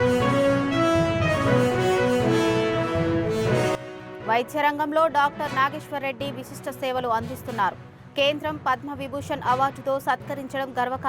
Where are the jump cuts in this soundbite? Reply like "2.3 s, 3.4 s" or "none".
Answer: none

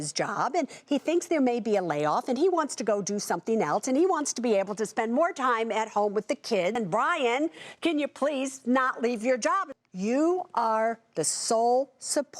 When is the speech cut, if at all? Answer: 6.7 s, 9.7 s

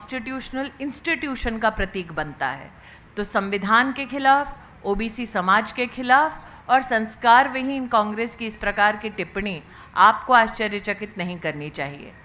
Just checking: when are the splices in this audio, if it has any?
none

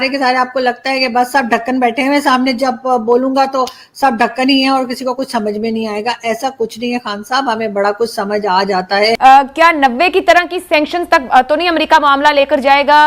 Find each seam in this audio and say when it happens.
9.2 s

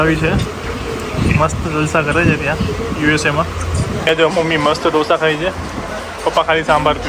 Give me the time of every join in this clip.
none

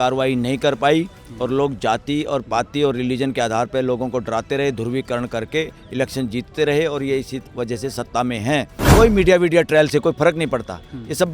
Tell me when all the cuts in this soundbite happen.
8.9 s

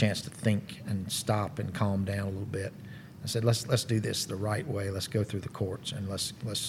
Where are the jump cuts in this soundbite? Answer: none

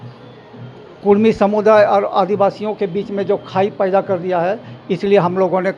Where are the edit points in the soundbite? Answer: none

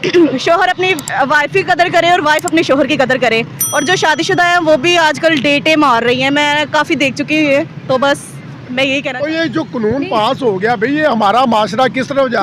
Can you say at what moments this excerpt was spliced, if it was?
9.1 s

